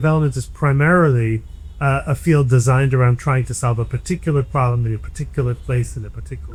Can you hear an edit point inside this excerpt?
no; 0 cuts

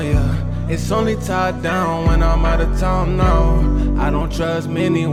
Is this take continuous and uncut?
yes; 0 cuts

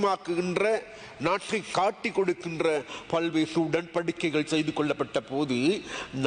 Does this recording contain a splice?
no; 0 cuts

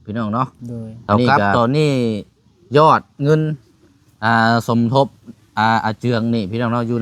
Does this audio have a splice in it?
yes; 1 cut; at 1.3 s

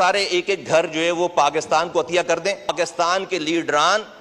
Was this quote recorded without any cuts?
no; 1 cut; at 2.7 s

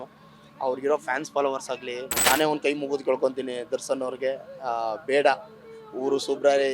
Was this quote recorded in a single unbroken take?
no; 1 cut; at 2.2 s

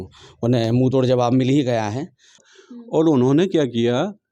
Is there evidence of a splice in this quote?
yes; 1 cut; at 2.3 s

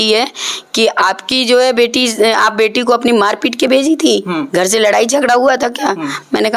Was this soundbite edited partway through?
no; 0 cuts

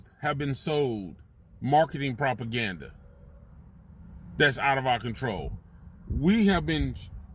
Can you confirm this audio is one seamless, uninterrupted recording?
yes; 0 cuts

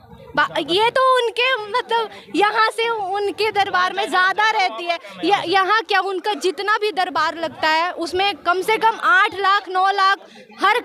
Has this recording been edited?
no; 0 cuts

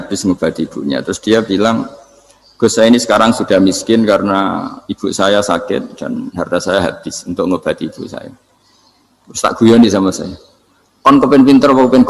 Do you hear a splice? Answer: no; 0 cuts

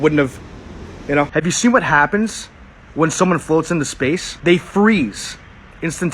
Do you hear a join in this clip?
yes; 2 cuts; at 1.3 s, 4.3 s

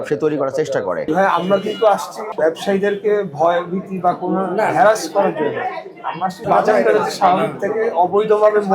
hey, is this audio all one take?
no; 3 cuts; at 1.1 s, 2.3 s, 6.4 s

